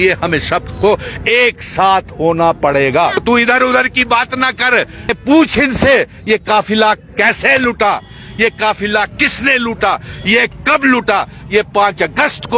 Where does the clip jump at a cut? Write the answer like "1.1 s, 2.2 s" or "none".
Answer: 3.2 s, 5.1 s